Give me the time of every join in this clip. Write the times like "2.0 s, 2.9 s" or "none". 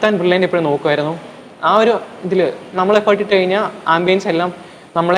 none